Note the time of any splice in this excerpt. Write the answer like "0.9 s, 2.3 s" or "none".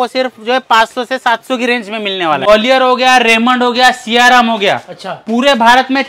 2.5 s

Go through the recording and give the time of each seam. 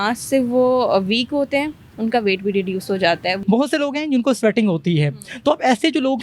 3.4 s

